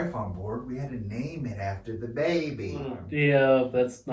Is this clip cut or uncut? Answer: cut